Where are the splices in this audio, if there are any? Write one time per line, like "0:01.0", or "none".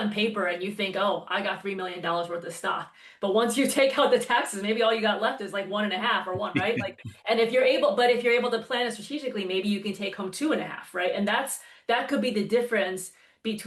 none